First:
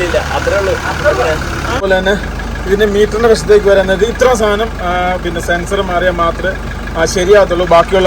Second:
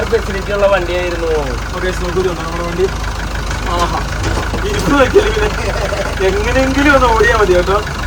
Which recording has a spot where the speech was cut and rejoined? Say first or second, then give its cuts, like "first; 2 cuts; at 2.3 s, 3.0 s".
first; 1 cut; at 1.8 s